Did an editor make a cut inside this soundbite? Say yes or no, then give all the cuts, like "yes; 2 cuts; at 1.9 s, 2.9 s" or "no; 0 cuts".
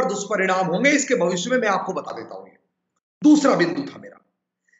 no; 0 cuts